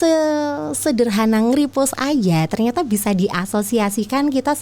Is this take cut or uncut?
uncut